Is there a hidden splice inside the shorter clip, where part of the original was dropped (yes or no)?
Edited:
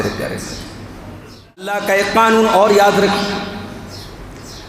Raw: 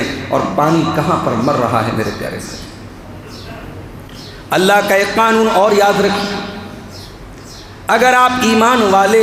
yes